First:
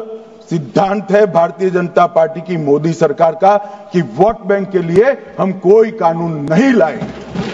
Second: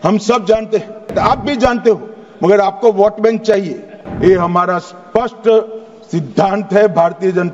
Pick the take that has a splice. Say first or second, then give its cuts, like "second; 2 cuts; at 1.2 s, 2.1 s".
second; 2 cuts; at 1.1 s, 4.0 s